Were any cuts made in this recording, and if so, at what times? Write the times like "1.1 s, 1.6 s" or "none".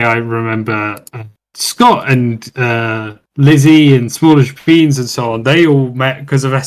none